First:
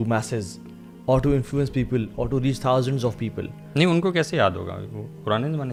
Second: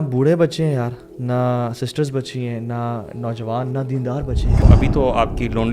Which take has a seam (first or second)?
second